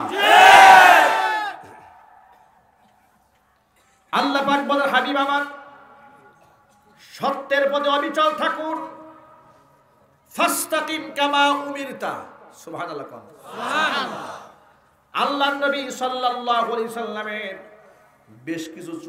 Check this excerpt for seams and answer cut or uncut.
uncut